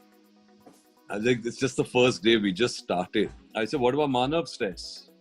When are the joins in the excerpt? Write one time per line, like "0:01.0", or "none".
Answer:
0:03.4